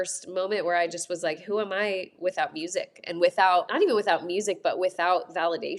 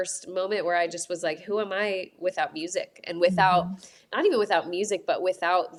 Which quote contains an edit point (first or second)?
first